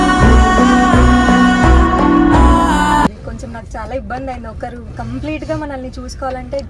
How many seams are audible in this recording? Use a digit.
1